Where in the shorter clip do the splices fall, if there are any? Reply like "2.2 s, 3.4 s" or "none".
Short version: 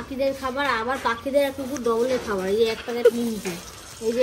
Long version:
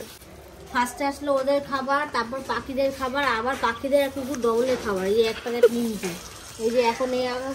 none